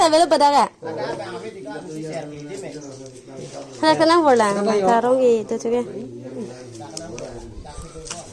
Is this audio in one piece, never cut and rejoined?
yes; 0 cuts

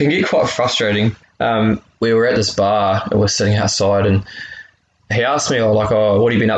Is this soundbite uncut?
no; 1 cut; at 1.9 s

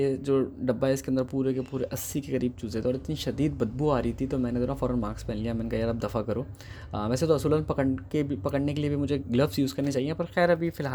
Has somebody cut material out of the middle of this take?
no; 0 cuts

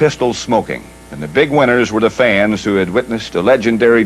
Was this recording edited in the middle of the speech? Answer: yes; 1 cut; at 1.4 s

